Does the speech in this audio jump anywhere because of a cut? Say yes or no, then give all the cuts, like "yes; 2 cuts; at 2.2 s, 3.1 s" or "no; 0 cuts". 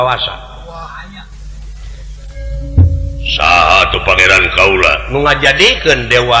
yes; 1 cut; at 2.4 s